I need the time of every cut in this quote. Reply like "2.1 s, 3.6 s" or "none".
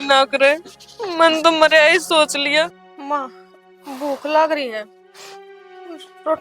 2.9 s